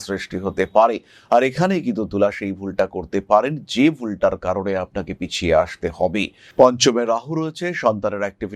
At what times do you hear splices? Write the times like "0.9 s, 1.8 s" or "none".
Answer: 6.5 s